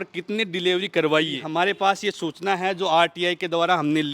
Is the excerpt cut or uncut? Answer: cut